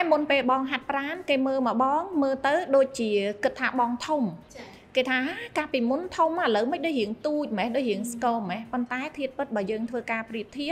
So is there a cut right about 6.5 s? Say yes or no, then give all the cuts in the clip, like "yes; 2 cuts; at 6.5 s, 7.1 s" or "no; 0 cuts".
no; 0 cuts